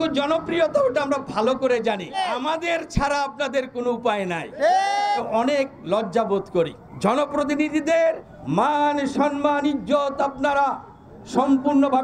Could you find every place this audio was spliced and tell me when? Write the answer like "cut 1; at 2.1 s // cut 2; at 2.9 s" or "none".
cut 1; at 2.2 s // cut 2; at 5.2 s // cut 3; at 6.8 s // cut 4; at 8.3 s